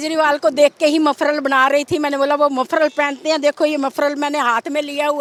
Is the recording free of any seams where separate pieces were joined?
yes; 0 cuts

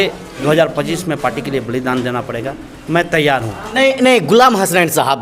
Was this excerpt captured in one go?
no; 1 cut; at 3.7 s

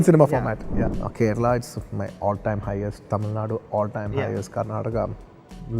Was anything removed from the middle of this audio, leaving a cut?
yes; 1 cut; at 0.9 s

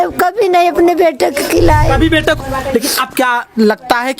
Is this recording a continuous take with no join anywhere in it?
no; 1 cut; at 2.4 s

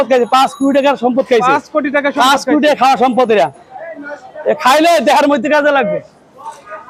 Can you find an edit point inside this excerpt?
no; 0 cuts

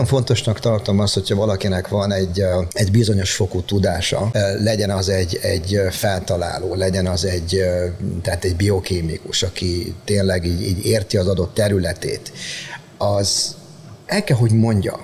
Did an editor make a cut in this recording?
yes; 2 cuts; at 2.7 s, 4.3 s

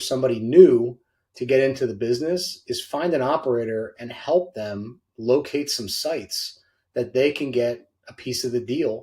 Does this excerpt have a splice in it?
no; 0 cuts

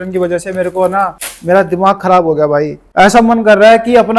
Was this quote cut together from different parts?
no; 0 cuts

